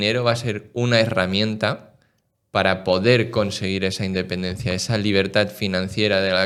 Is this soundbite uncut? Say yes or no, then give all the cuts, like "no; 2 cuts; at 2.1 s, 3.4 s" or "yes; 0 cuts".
yes; 0 cuts